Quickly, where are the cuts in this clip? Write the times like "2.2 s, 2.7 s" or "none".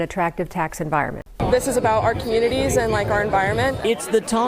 1.2 s